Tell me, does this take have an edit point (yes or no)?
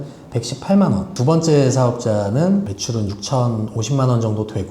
yes